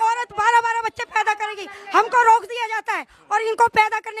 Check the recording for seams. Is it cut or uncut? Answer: uncut